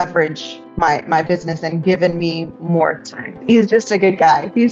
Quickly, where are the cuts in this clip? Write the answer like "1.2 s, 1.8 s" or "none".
3.4 s